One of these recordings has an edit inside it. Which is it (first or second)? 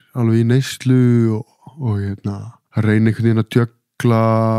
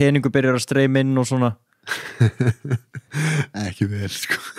first